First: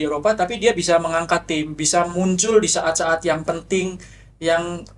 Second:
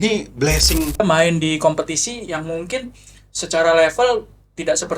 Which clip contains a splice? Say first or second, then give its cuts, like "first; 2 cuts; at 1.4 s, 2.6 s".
second; 1 cut; at 1.0 s